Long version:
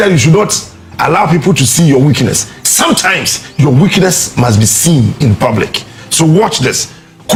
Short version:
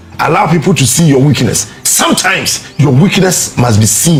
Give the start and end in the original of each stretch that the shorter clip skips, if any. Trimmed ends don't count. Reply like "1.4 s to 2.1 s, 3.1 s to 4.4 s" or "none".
none